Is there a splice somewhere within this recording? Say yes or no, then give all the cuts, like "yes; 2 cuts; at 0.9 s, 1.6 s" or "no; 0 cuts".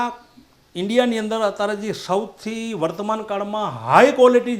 no; 0 cuts